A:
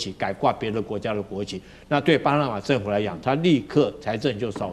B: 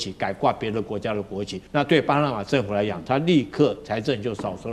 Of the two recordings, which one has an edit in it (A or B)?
B